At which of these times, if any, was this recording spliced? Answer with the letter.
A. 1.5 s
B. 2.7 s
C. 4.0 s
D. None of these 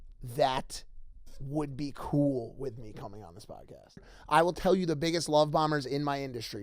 C